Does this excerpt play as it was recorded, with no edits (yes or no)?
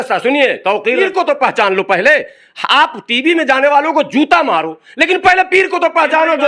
no